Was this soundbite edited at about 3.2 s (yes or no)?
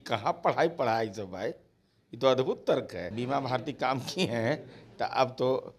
yes